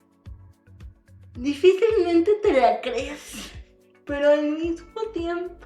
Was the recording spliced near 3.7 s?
yes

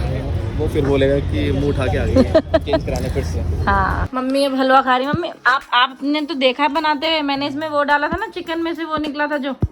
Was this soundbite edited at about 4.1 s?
yes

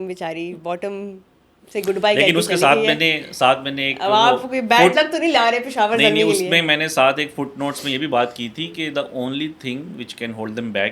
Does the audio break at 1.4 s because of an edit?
no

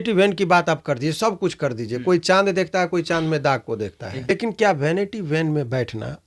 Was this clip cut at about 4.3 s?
yes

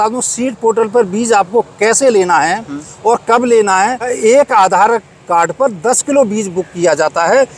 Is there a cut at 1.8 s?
no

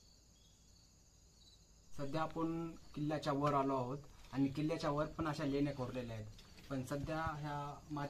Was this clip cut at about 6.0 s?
no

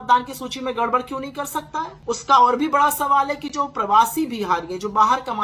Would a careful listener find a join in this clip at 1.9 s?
yes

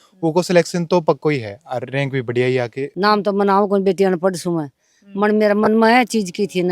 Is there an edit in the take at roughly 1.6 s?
no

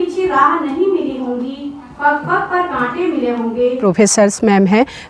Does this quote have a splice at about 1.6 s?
no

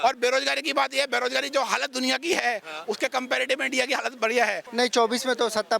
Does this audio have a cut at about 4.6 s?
yes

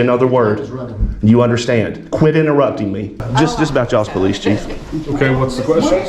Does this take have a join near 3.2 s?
yes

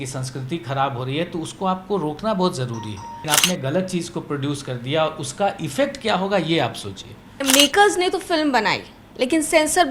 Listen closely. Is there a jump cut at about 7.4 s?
yes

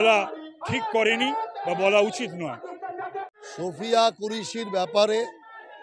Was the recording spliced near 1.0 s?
no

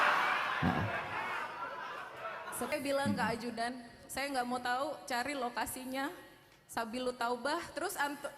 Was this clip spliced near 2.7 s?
yes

